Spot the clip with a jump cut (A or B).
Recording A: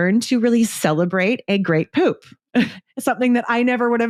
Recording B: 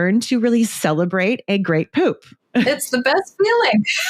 B